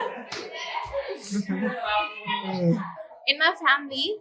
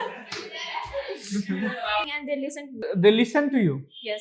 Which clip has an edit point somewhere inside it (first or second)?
second